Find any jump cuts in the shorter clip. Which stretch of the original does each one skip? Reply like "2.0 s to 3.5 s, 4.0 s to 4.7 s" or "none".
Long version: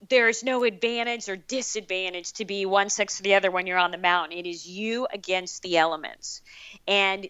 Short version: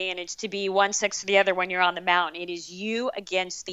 none